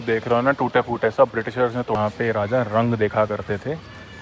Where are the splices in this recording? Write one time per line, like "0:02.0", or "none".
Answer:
0:02.0